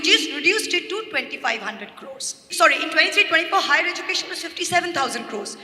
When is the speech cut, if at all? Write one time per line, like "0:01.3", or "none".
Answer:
0:02.4